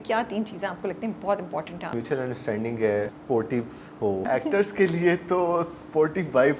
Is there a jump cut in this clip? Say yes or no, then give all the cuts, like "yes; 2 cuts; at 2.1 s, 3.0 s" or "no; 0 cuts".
yes; 3 cuts; at 1.9 s, 3.2 s, 4.3 s